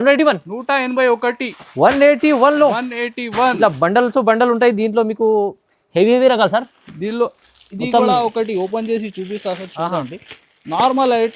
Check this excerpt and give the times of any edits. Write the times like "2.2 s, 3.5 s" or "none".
none